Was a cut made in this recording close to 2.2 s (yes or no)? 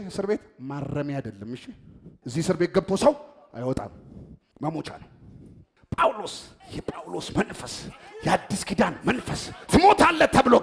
yes